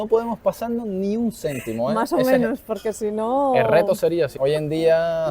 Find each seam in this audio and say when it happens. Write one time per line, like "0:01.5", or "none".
0:04.3